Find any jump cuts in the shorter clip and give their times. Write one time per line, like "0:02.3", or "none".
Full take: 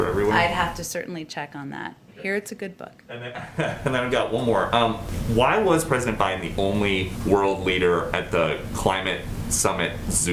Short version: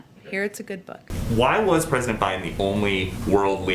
0:01.1